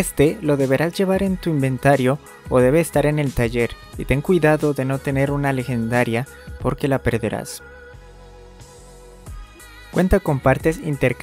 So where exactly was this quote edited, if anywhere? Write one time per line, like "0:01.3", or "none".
0:07.5
0:09.9